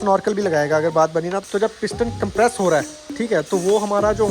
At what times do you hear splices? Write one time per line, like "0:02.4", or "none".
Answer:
0:01.4

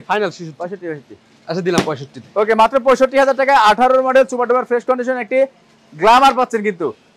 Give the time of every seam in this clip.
none

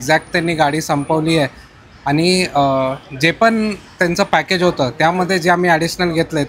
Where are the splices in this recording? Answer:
none

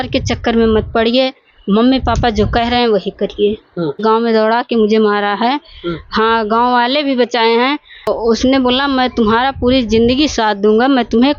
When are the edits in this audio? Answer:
0:04.0
0:08.1

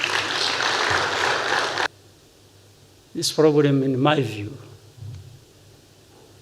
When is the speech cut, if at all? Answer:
0:01.9

